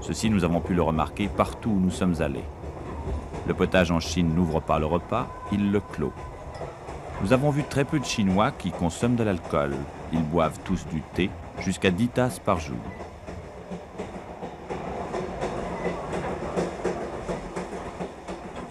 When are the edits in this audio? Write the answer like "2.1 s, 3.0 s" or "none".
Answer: none